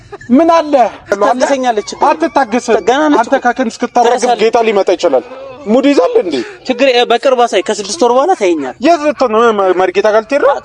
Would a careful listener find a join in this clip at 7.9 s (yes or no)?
no